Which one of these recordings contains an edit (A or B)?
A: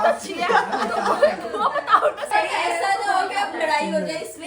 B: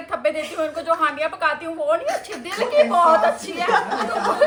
A